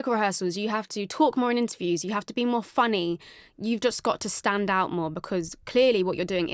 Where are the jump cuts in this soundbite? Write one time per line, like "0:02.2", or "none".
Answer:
none